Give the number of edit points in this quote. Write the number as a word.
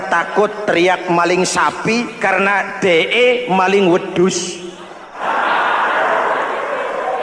zero